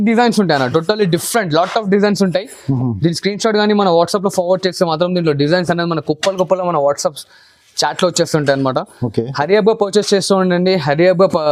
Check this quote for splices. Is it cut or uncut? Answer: uncut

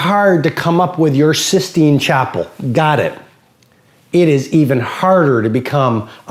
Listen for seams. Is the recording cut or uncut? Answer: uncut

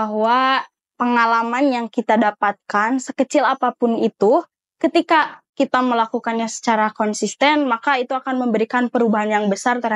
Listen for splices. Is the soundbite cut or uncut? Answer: uncut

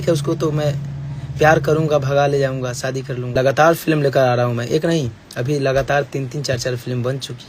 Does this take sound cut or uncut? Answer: cut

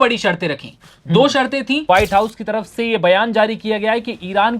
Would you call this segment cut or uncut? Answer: cut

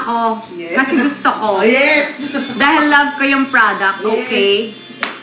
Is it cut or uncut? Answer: uncut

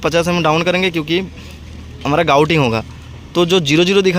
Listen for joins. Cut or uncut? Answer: uncut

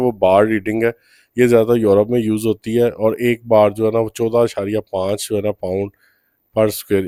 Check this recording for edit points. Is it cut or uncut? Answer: uncut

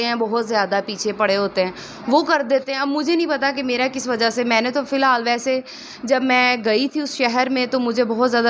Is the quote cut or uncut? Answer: uncut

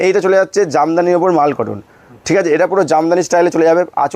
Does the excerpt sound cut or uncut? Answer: uncut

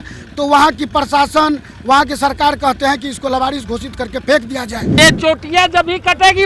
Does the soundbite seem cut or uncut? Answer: cut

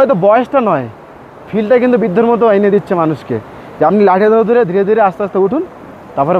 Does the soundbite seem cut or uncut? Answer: uncut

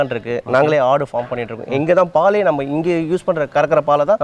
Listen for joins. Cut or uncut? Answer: uncut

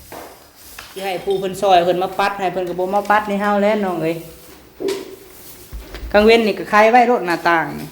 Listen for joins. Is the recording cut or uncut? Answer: cut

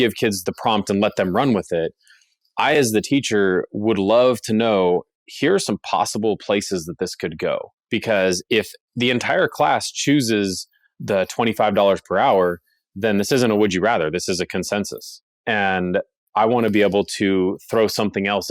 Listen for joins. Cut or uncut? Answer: uncut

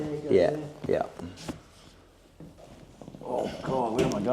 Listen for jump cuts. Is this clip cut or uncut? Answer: cut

